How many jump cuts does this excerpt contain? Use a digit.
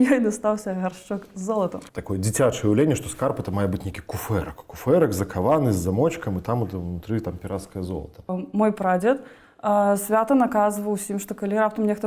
2